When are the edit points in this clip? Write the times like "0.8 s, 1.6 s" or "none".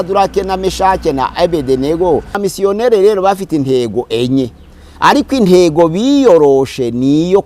2.4 s